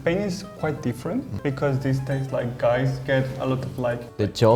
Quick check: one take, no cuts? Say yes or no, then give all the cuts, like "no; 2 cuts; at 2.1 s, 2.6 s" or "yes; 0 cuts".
yes; 0 cuts